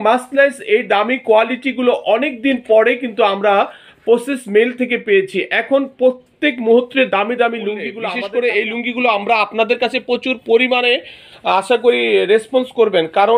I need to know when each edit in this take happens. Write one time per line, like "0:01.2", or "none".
0:07.9